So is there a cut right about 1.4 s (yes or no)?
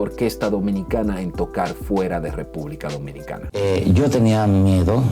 no